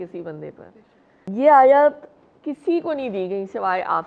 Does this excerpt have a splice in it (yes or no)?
yes